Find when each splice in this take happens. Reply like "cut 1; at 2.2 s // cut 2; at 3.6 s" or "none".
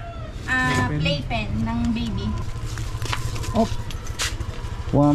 cut 1; at 2.5 s